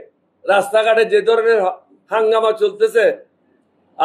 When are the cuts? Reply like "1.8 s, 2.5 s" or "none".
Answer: none